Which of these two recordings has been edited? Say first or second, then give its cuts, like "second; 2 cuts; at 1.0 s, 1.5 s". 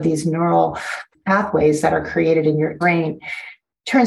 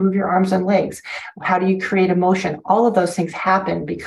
first; 2 cuts; at 1.0 s, 2.8 s